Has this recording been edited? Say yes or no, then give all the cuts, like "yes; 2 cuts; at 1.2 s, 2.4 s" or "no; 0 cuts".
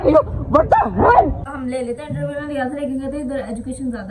yes; 1 cut; at 1.5 s